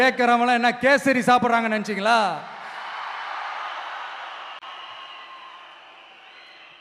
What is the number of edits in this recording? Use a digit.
0